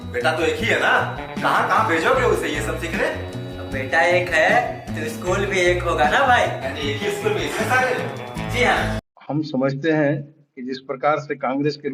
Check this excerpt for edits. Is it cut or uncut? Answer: cut